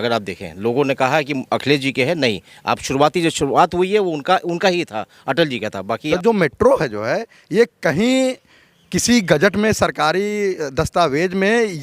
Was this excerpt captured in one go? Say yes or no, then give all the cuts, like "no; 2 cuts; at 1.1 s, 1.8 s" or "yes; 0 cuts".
no; 1 cut; at 6.0 s